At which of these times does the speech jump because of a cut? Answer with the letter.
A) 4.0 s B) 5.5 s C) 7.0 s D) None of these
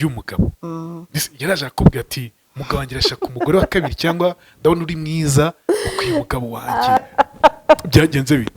C